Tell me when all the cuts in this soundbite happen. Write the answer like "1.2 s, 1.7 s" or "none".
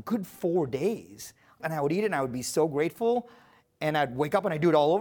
1.6 s